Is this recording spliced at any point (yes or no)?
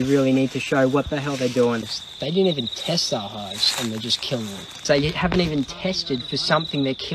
yes